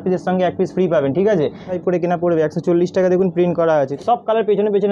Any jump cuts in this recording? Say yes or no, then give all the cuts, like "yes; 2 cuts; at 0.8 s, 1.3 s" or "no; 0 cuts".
yes; 2 cuts; at 1.8 s, 3.9 s